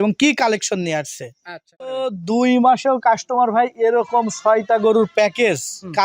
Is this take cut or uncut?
cut